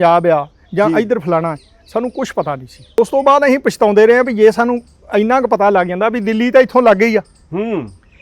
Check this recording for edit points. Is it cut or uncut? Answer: cut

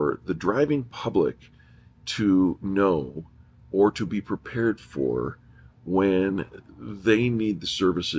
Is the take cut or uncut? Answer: uncut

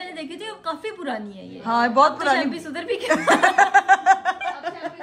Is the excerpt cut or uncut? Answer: uncut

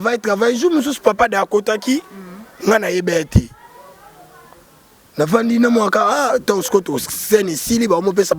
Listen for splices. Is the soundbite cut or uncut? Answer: uncut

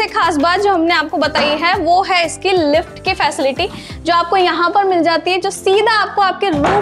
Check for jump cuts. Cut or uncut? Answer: uncut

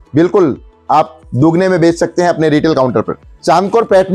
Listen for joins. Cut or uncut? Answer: cut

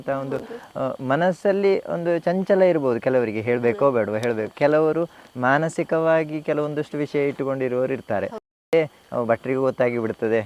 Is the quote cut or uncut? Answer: cut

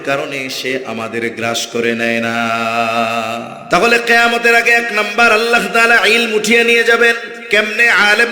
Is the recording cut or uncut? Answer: cut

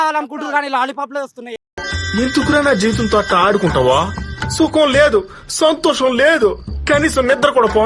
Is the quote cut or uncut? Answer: uncut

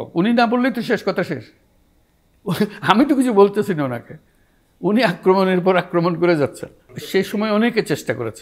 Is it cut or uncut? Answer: cut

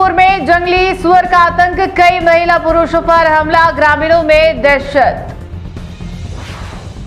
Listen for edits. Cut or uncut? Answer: uncut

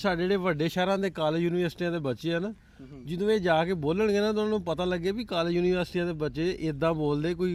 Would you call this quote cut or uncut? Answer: uncut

